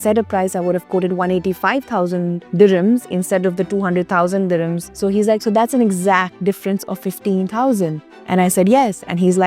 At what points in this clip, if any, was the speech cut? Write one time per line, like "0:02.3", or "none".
0:02.4
0:04.8
0:06.3